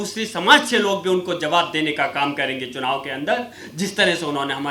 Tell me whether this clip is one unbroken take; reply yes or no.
yes